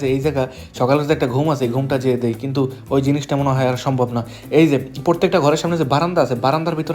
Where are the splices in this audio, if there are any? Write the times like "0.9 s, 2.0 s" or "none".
none